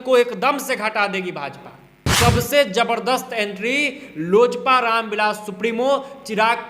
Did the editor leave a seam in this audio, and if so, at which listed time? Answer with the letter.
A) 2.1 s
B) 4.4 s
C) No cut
A